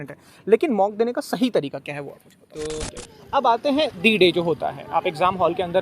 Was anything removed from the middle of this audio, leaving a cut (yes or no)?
yes